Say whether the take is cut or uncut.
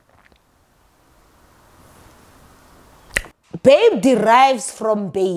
cut